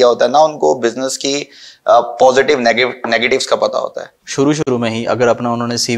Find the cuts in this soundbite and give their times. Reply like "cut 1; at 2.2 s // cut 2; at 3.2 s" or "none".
cut 1; at 4.7 s